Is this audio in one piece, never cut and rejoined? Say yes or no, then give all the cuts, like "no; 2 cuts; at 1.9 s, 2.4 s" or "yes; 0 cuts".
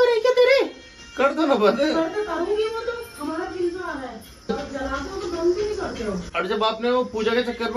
yes; 0 cuts